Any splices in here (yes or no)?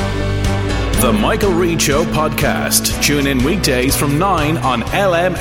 no